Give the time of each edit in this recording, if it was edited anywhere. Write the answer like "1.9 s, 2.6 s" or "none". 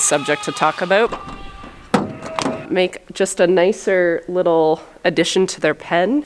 1.1 s, 2.7 s